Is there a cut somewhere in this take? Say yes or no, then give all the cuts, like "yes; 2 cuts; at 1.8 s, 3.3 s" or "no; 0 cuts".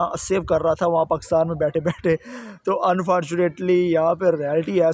no; 0 cuts